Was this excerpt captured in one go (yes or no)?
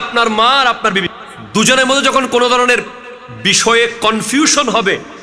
no